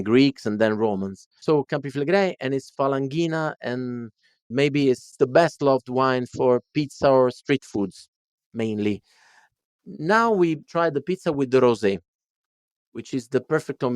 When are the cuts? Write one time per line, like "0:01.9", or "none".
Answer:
0:05.1
0:10.7